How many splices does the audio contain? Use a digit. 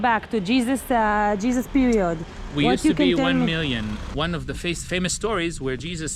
1